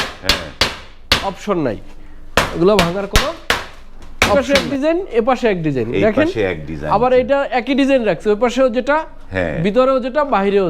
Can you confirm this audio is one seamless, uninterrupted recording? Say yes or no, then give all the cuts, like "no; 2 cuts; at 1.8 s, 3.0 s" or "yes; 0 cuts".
no; 1 cut; at 4.4 s